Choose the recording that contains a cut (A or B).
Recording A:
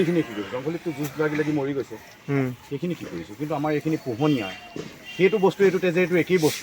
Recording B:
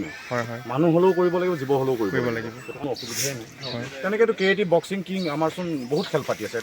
B